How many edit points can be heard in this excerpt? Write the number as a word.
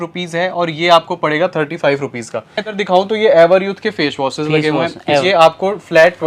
two